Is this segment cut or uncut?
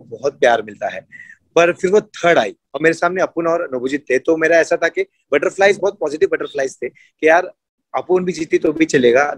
uncut